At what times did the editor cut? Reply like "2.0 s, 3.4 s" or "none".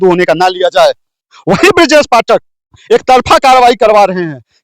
1.2 s